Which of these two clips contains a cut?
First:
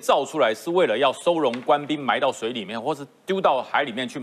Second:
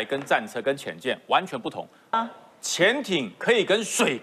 second; 1 cut; at 2.1 s

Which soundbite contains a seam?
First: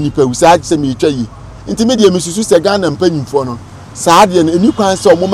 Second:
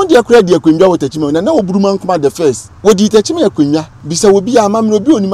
second; 2 cuts; at 2.7 s, 4.0 s

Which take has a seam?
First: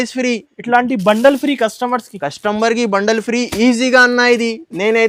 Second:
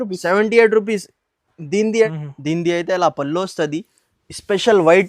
second; 1 cut; at 2.1 s

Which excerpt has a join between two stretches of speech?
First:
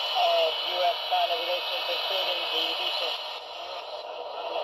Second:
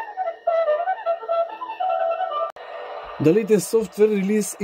second; 1 cut; at 2.5 s

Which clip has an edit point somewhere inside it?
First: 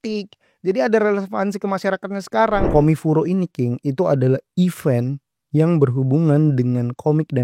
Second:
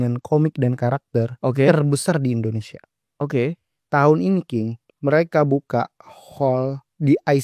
first; 1 cut; at 2.7 s

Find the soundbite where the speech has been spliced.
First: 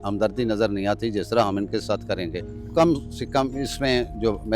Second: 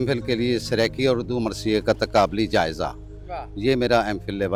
first; 1 cut; at 2.7 s

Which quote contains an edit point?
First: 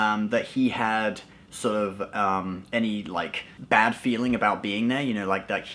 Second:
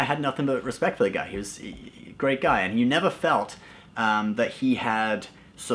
first; 1 cut; at 3.5 s

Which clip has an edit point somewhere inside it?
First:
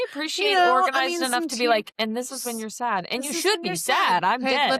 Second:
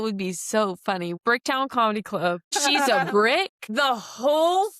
second; 3 cuts; at 1.1 s, 2.5 s, 3.6 s

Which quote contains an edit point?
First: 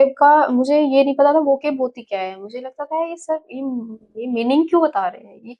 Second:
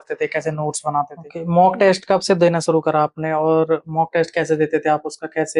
second; 1 cut; at 1.2 s

